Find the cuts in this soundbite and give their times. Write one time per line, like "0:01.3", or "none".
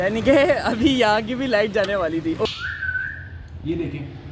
0:02.5